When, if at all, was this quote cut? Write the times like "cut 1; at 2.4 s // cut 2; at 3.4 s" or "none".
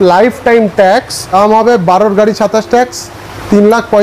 cut 1; at 1.2 s